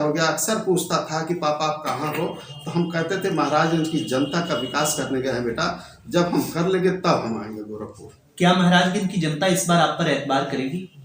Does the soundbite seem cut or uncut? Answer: uncut